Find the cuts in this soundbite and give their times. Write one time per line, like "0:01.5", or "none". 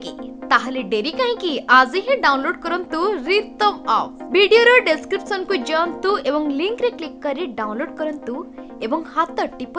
none